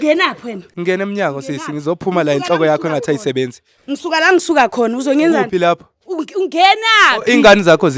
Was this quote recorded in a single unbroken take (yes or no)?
yes